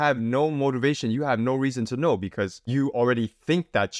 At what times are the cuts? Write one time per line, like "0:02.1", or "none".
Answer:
0:02.6